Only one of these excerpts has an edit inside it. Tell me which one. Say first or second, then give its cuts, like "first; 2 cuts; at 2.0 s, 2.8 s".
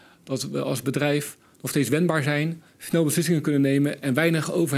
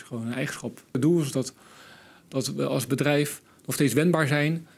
second; 1 cut; at 1.0 s